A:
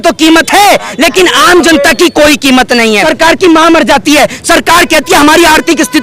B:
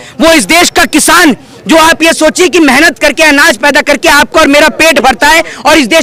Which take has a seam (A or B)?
A